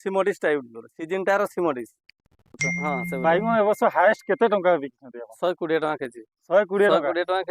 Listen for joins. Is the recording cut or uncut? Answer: cut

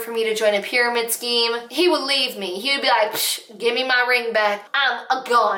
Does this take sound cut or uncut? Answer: uncut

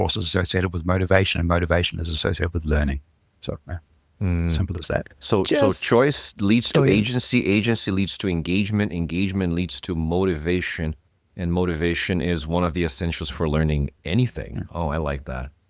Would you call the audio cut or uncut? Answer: uncut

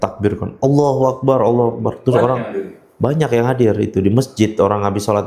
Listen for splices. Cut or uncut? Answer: uncut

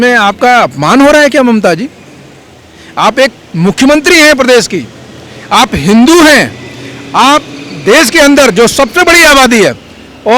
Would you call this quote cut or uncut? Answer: uncut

